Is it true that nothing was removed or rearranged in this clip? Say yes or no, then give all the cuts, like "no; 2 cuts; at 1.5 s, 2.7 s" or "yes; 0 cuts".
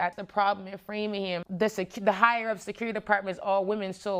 yes; 0 cuts